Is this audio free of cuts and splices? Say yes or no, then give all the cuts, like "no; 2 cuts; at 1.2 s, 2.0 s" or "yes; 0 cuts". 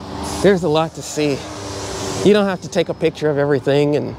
yes; 0 cuts